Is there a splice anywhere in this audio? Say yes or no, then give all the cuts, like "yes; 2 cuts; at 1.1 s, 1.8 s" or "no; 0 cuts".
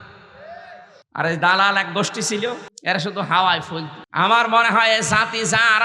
yes; 3 cuts; at 0.9 s, 2.7 s, 4.0 s